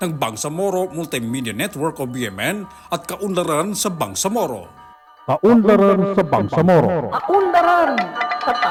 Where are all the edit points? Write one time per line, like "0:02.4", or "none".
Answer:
none